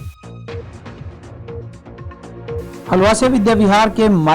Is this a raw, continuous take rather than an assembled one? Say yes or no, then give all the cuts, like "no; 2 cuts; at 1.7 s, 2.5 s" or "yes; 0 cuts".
no; 2 cuts; at 1.8 s, 2.9 s